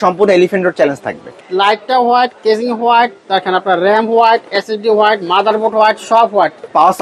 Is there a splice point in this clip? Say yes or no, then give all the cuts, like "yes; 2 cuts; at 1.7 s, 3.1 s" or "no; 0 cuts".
yes; 1 cut; at 1.4 s